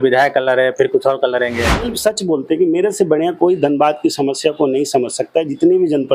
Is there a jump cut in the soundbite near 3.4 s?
no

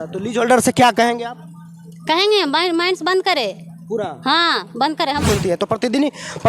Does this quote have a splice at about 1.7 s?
no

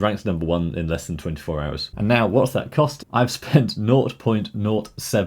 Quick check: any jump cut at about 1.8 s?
yes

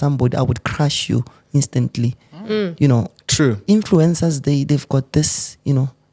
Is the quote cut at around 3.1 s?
no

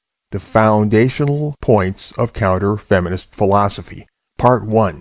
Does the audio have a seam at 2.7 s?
yes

